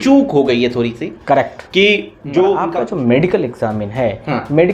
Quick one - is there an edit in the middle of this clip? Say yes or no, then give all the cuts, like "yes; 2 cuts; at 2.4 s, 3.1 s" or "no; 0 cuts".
yes; 1 cut; at 2.9 s